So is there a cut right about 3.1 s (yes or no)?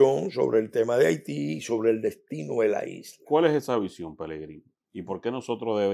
yes